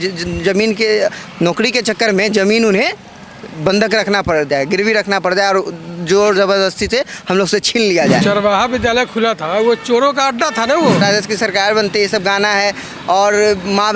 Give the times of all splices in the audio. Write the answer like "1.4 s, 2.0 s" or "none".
8.2 s, 11.0 s